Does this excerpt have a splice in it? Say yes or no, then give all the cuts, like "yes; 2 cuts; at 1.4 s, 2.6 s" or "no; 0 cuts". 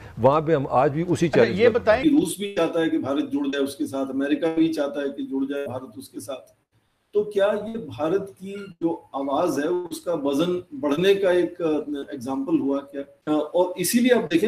yes; 2 cuts; at 2.0 s, 13.2 s